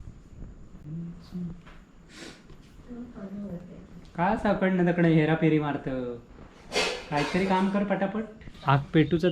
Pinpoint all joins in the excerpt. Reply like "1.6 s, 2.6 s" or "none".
8.4 s